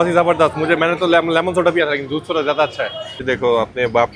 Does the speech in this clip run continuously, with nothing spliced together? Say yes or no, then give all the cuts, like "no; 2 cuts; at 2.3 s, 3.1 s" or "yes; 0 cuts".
no; 1 cut; at 3.2 s